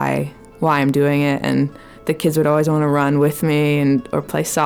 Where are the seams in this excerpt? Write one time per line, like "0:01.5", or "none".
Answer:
none